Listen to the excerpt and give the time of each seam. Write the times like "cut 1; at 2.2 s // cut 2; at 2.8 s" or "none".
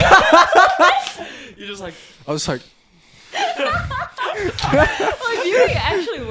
none